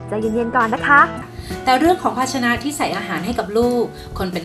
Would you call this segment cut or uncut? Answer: cut